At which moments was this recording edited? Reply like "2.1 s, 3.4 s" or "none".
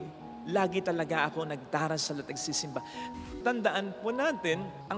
3.4 s

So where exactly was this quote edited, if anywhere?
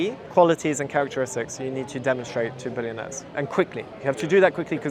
none

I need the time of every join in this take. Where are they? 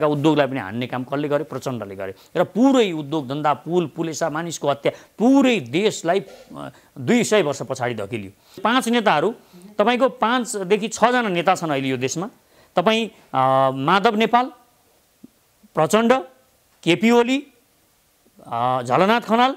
8.6 s

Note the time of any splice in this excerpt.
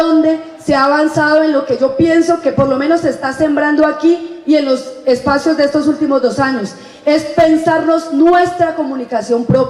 4.9 s

